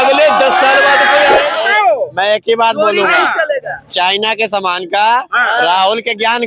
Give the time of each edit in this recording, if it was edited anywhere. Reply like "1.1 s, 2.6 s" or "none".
1.5 s